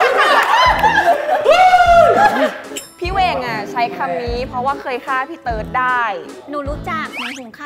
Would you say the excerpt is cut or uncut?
cut